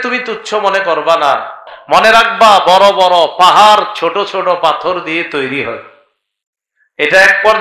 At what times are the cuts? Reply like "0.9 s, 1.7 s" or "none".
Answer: 1.6 s